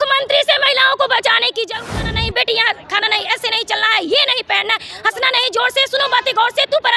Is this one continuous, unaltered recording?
no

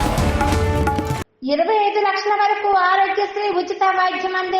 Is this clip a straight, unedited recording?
no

